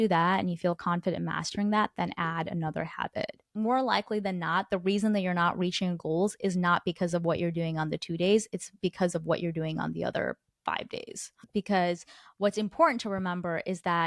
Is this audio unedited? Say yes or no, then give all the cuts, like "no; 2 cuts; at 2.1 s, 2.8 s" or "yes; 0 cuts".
no; 2 cuts; at 3.5 s, 11.4 s